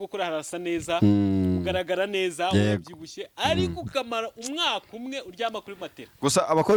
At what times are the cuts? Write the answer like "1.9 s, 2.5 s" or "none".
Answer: none